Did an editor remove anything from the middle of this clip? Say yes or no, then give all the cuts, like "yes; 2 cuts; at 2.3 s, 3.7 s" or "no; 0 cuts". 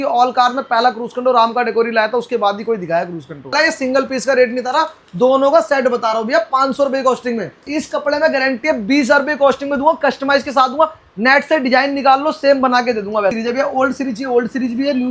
yes; 3 cuts; at 3.5 s, 7.6 s, 13.3 s